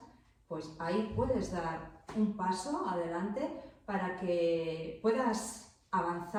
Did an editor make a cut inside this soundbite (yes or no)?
no